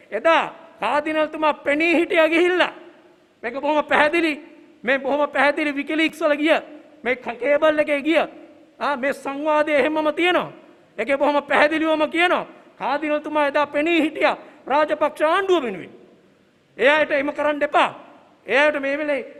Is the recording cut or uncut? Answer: uncut